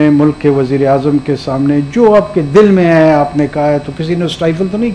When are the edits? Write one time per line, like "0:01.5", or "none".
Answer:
none